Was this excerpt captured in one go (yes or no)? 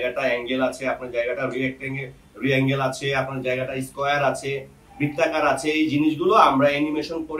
yes